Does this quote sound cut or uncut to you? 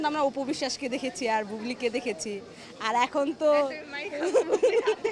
uncut